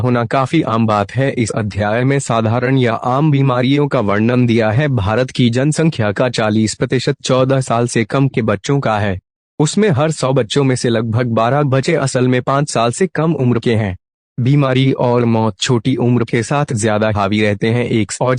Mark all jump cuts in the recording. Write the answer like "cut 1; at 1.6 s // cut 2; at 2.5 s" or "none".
cut 1; at 1.1 s